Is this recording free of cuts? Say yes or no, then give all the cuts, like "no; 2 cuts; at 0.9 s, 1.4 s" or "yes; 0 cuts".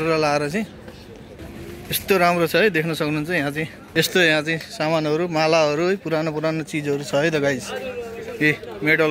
no; 1 cut; at 3.7 s